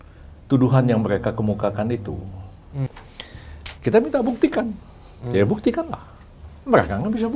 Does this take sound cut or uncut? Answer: cut